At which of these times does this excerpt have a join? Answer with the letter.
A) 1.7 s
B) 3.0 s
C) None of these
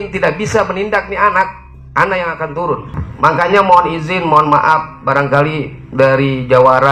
B